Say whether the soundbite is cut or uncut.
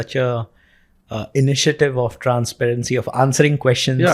uncut